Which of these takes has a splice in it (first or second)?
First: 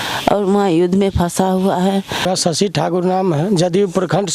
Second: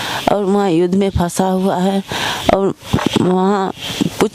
first